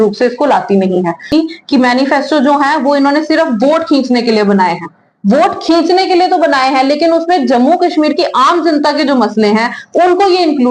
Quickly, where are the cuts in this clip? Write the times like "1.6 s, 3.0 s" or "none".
1.3 s

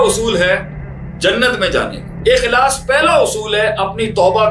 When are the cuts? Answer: 2.1 s

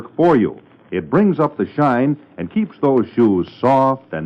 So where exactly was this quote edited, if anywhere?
none

